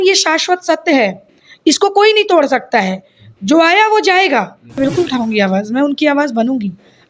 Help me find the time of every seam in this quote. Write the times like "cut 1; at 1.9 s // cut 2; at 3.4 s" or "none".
cut 1; at 4.8 s